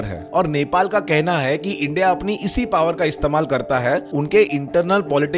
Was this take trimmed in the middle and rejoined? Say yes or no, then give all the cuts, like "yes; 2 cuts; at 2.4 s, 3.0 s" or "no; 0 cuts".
no; 0 cuts